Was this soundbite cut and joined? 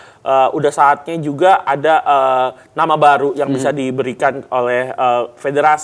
no; 0 cuts

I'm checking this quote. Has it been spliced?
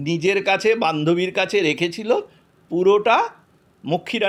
no; 0 cuts

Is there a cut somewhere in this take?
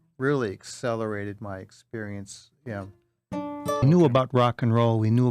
yes; 1 cut; at 3.8 s

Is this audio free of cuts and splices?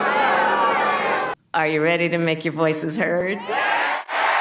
no; 1 cut; at 1.4 s

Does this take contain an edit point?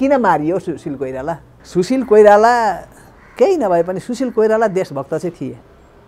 yes; 1 cut; at 1.5 s

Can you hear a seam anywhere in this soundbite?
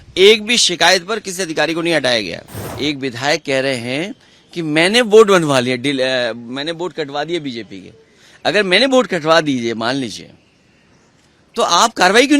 yes; 1 cut; at 2.6 s

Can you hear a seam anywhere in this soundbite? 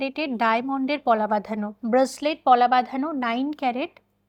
no; 0 cuts

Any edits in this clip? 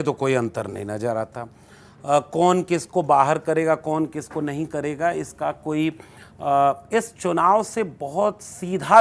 no; 0 cuts

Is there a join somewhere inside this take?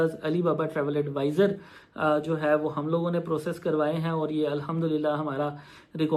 no; 0 cuts

